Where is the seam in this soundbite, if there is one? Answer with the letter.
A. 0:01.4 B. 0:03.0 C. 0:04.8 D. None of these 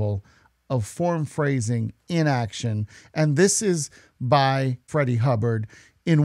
C